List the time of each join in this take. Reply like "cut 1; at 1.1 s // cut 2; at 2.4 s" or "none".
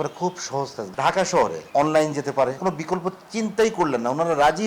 cut 1; at 0.8 s // cut 2; at 1.6 s // cut 3; at 2.6 s